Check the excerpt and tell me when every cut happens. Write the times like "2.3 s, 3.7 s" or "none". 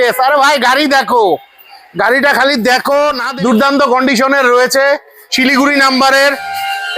3.2 s